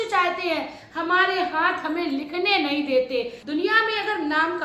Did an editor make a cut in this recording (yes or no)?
yes